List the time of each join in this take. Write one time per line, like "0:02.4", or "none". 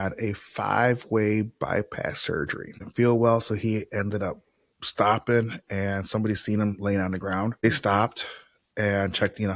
0:02.9
0:07.6